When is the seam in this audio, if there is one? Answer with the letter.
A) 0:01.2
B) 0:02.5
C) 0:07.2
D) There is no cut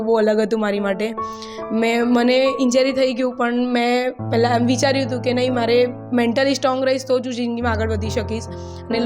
D